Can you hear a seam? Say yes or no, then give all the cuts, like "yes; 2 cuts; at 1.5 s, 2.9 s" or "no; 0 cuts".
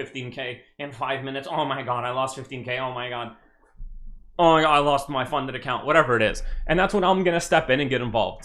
no; 0 cuts